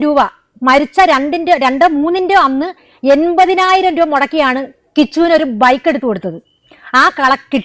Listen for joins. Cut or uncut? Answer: uncut